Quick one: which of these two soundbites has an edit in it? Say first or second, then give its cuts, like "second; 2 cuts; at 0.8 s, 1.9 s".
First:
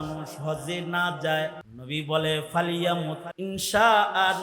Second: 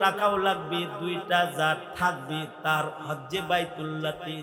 first; 2 cuts; at 1.7 s, 3.3 s